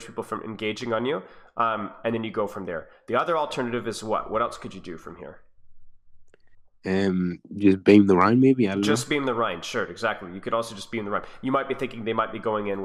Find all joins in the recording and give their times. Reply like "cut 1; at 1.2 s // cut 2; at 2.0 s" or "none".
none